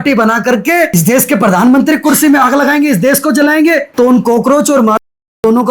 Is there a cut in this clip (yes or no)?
yes